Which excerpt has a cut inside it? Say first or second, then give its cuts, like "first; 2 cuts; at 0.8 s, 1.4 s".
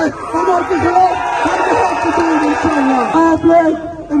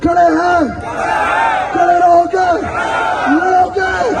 first; 1 cut; at 3.1 s